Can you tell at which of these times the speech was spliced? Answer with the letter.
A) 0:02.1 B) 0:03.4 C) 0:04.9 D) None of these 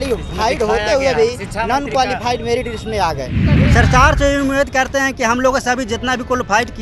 B